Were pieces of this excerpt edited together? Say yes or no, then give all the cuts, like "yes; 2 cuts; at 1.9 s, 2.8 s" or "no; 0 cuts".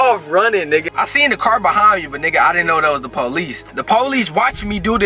yes; 2 cuts; at 0.9 s, 3.6 s